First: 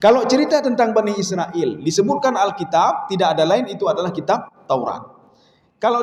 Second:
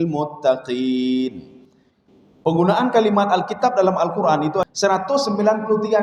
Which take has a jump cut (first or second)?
second